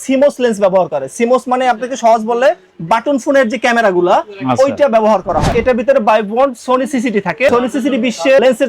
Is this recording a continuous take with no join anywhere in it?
no; 2 cuts; at 5.5 s, 7.5 s

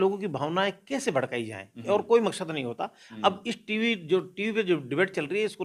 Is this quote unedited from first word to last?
yes; 0 cuts

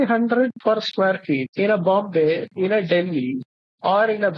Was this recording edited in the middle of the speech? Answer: yes; 1 cut; at 1.5 s

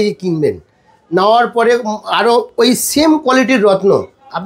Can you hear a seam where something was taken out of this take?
no; 0 cuts

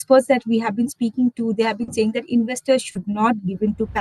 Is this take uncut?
yes; 0 cuts

